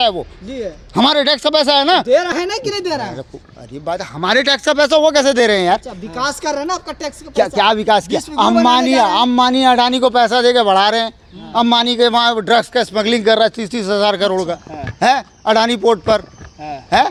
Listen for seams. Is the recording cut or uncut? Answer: uncut